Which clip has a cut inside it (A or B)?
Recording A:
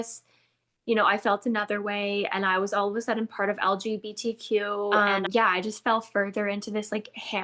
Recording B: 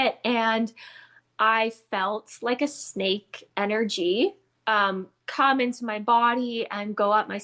A